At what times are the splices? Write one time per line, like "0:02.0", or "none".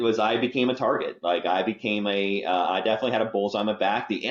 none